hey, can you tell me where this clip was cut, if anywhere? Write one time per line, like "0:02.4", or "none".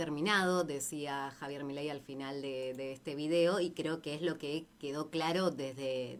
none